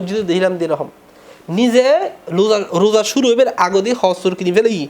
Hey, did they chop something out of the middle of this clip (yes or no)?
no